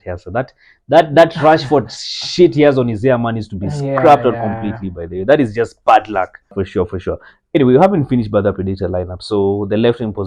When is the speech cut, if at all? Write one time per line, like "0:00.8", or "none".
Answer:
0:06.6